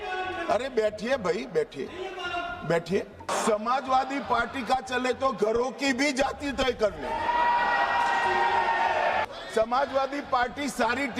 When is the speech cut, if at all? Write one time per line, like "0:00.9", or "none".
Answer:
0:03.3
0:09.2